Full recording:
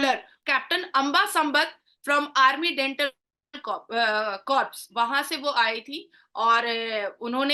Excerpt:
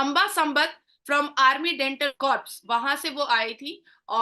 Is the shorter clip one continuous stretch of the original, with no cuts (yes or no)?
no